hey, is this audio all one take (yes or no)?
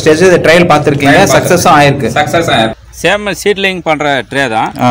no